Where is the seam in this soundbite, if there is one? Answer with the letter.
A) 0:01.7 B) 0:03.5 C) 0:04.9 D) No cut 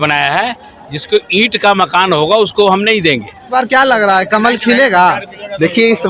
B